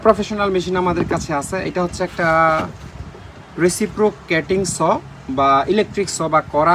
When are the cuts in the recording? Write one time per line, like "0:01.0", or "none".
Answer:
none

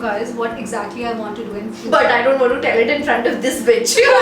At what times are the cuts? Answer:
none

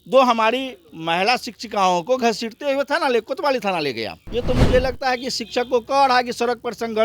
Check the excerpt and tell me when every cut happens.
0:04.2

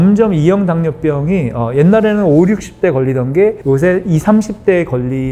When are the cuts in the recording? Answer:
none

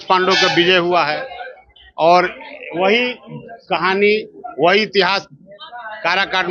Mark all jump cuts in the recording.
none

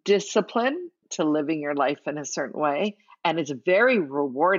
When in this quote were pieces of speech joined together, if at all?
0:01.0

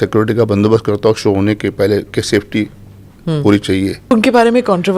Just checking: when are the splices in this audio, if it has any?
0:04.0

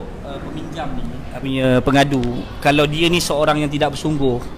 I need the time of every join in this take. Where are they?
0:01.4

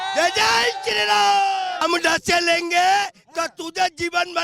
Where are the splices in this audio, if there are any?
0:01.8

